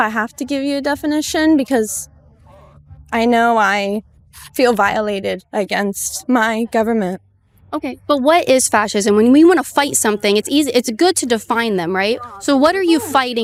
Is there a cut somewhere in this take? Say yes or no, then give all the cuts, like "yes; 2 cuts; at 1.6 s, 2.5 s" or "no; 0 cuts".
no; 0 cuts